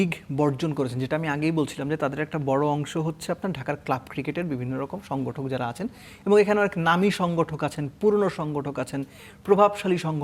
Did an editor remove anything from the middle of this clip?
no; 0 cuts

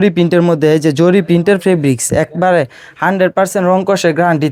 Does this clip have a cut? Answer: no; 0 cuts

